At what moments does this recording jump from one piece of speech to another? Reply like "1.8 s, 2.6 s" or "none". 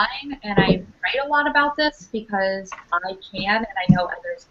1.4 s

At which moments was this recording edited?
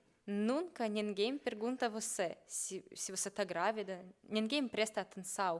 none

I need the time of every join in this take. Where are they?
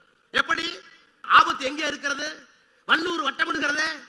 1.2 s

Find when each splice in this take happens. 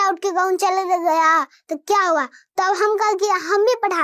none

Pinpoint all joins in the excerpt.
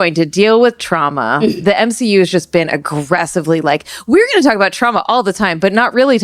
1.5 s

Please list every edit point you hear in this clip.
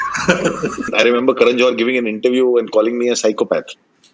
0.9 s

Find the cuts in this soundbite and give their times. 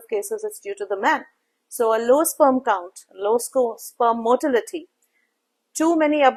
none

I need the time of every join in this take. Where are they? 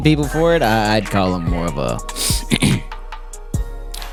none

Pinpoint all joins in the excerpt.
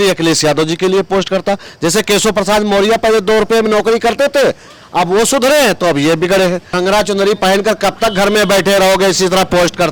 6.7 s

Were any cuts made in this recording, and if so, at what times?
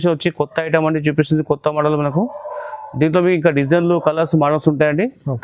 none

